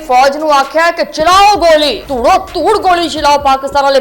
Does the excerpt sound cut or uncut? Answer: cut